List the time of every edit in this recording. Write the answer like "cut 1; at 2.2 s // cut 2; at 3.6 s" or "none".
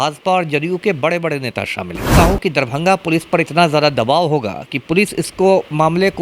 cut 1; at 2.1 s